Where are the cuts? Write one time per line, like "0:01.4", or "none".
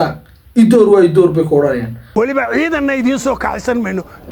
0:02.0